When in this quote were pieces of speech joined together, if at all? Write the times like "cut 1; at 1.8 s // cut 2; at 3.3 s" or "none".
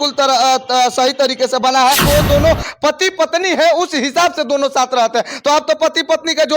cut 1; at 2.0 s